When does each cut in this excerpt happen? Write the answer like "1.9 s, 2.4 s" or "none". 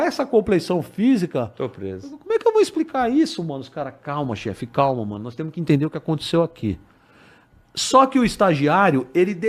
none